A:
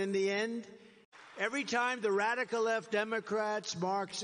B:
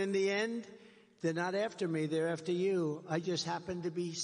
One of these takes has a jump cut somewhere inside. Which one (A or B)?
B